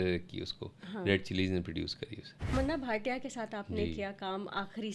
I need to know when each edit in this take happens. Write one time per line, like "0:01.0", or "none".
0:02.5